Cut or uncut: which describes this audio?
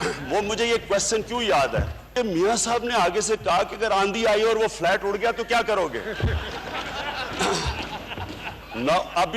cut